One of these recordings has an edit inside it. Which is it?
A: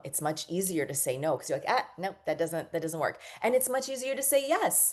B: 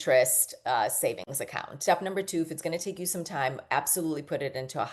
B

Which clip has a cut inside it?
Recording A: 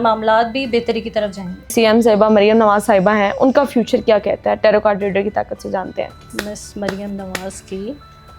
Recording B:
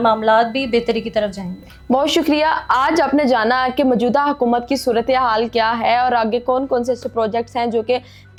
A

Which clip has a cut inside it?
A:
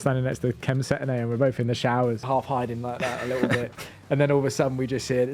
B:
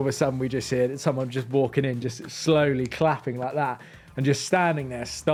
A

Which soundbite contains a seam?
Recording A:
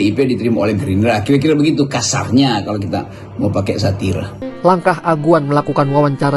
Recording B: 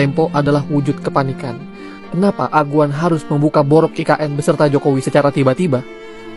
A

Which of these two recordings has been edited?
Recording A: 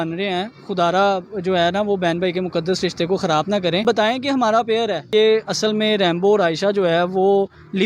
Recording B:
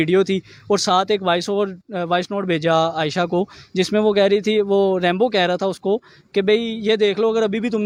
A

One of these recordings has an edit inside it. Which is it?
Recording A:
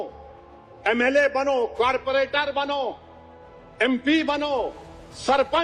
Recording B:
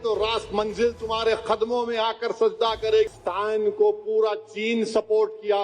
B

